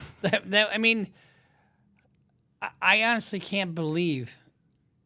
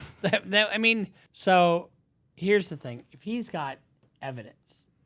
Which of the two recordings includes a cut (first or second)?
second